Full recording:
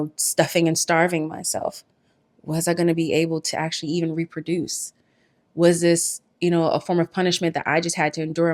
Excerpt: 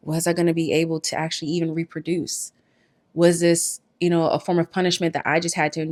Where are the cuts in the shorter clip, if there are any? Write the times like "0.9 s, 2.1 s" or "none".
none